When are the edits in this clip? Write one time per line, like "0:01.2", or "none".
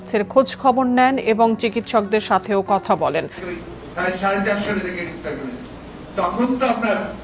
0:03.4

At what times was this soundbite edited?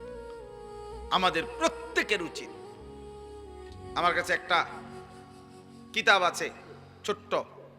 0:01.1

